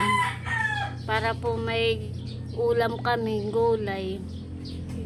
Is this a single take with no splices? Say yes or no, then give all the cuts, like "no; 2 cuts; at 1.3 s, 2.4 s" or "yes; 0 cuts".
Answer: yes; 0 cuts